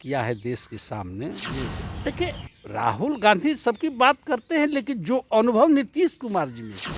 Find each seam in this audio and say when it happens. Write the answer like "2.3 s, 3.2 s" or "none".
1.9 s